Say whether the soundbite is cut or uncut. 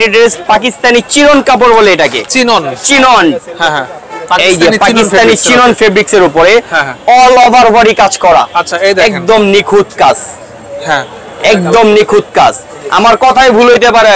uncut